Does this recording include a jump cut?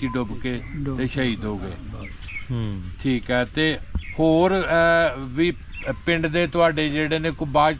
no; 0 cuts

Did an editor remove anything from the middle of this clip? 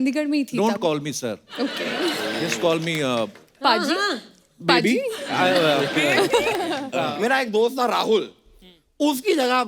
yes; 1 cut; at 6.9 s

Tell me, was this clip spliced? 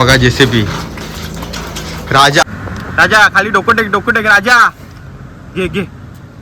yes; 1 cut; at 2.4 s

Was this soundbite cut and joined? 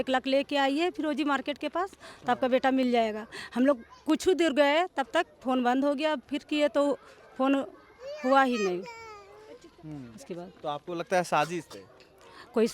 no; 0 cuts

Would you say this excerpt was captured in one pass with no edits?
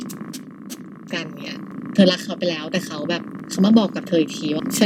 yes; 0 cuts

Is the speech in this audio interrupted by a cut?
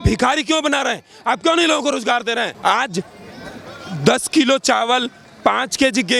yes; 1 cut; at 2.5 s

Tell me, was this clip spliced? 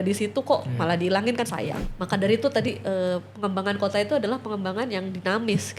yes; 1 cut; at 1.9 s

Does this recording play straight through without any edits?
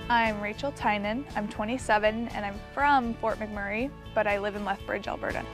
yes; 0 cuts

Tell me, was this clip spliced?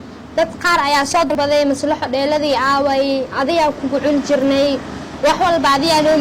yes; 1 cut; at 1.3 s

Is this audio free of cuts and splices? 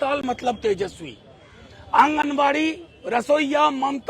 yes; 0 cuts

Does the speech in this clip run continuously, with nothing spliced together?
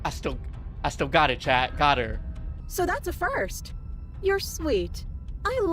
no; 1 cut; at 2.6 s

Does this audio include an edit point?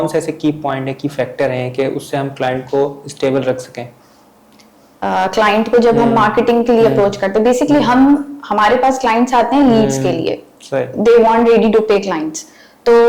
no; 0 cuts

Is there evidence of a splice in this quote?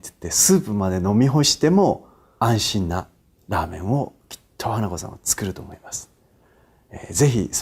yes; 1 cut; at 2.2 s

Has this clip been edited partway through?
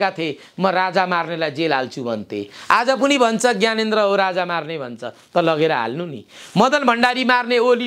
no; 0 cuts

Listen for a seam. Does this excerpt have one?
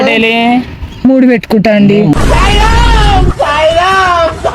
no; 0 cuts

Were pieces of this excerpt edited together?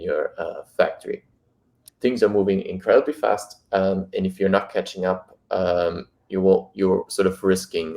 yes; 1 cut; at 1.8 s

